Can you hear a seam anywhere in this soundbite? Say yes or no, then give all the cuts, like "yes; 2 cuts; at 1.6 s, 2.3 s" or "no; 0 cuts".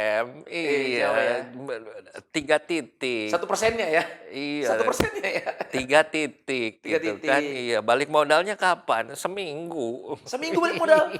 no; 0 cuts